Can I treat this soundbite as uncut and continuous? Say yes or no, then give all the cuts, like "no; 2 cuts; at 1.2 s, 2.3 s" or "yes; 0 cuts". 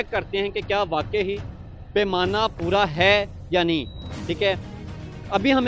no; 1 cut; at 4.1 s